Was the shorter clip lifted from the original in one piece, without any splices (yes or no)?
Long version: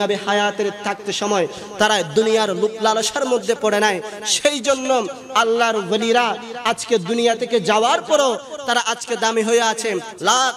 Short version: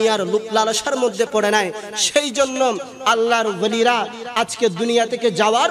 yes